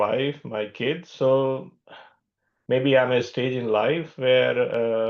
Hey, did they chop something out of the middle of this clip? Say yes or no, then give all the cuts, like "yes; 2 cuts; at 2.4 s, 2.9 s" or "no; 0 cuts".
yes; 1 cut; at 1.1 s